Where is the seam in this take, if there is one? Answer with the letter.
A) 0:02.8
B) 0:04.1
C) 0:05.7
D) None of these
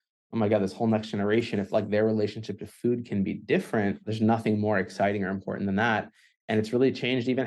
B